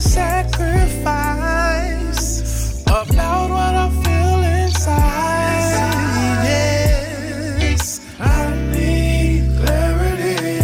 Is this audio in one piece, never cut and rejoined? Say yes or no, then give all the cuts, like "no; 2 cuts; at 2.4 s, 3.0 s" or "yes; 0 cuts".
yes; 0 cuts